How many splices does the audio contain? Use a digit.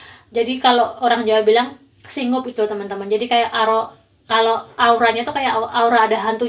0